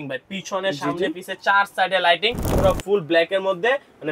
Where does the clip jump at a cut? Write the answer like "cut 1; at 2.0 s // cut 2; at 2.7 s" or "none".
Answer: cut 1; at 2.4 s